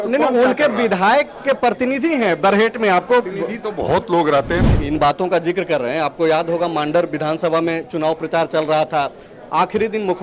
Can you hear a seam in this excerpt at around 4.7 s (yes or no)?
yes